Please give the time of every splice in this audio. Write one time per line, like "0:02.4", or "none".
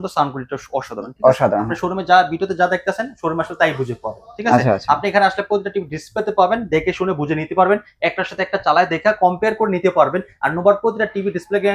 0:01.8